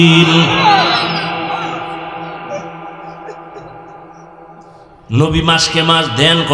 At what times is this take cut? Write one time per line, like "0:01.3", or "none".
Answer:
0:05.0